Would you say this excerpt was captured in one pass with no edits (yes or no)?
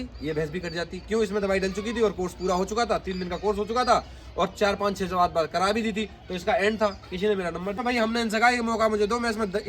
no